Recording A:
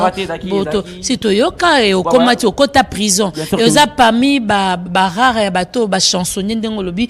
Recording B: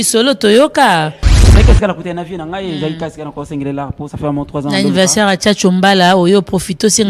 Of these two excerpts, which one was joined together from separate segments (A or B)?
B